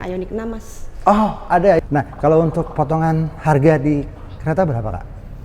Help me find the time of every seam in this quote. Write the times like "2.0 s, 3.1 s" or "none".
1.8 s